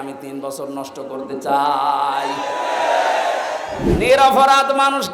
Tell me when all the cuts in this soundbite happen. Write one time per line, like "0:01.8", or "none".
0:03.9